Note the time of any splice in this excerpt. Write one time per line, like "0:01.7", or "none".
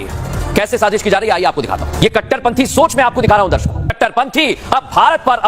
0:01.9
0:04.0